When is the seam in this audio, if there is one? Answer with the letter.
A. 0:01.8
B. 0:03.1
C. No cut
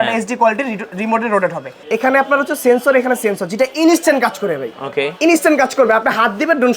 A